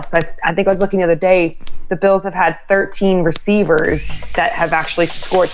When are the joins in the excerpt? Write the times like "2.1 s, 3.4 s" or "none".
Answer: none